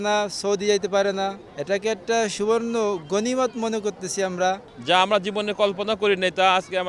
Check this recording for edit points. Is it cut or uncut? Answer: cut